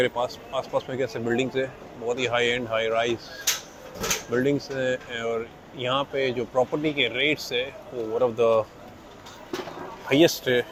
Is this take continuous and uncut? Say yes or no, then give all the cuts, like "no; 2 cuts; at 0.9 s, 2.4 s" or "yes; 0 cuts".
yes; 0 cuts